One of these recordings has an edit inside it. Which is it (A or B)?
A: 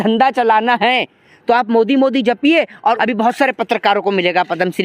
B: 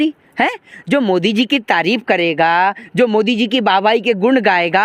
A